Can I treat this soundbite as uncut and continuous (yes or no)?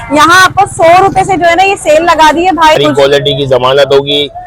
no